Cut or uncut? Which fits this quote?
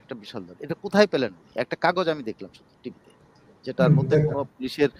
uncut